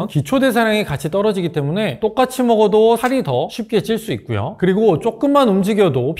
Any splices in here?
no; 0 cuts

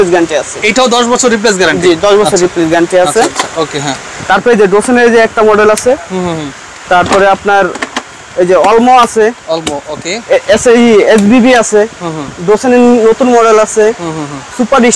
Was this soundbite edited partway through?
no; 0 cuts

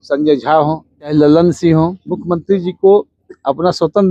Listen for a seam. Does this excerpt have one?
yes; 2 cuts; at 1.1 s, 2.1 s

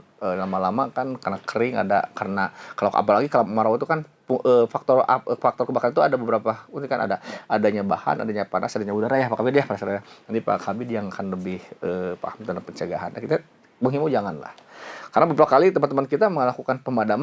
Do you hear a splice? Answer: no; 0 cuts

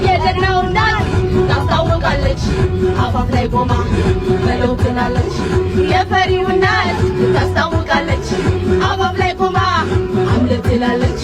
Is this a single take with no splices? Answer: yes; 0 cuts

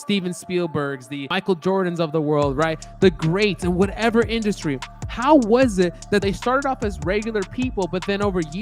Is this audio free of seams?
no; 1 cut; at 1.3 s

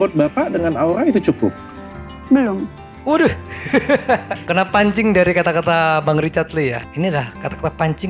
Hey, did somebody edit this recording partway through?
no; 0 cuts

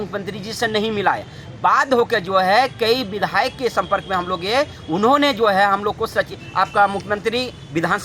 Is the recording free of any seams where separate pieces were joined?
yes; 0 cuts

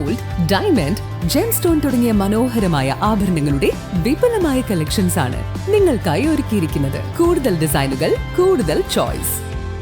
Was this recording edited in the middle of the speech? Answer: yes; 1 cut; at 7.0 s

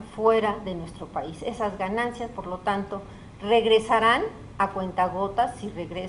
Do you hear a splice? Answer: yes; 1 cut; at 4.4 s

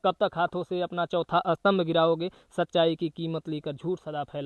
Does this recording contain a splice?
no; 0 cuts

